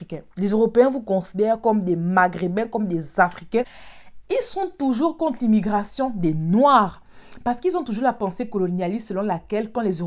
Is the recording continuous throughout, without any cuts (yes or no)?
no